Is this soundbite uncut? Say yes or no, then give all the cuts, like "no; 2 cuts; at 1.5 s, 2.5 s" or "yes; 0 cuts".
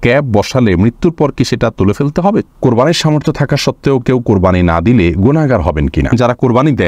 no; 2 cuts; at 2.5 s, 6.1 s